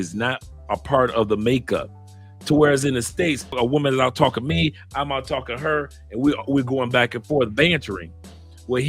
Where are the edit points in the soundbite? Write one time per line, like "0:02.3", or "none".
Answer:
0:03.6

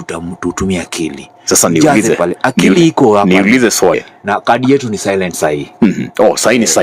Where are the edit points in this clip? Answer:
0:04.1

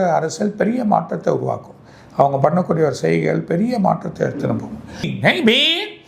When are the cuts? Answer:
0:05.1

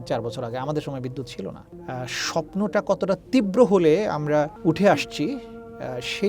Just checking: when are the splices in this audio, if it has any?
0:01.7
0:04.5

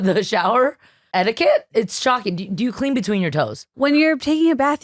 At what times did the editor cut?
0:00.9
0:01.7
0:03.8

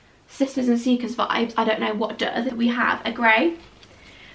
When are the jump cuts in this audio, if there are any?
0:02.5

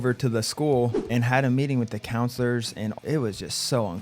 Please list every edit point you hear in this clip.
0:01.0
0:03.0

